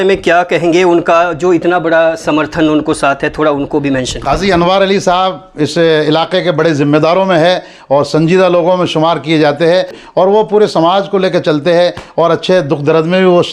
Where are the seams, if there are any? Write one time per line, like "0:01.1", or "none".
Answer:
0:10.0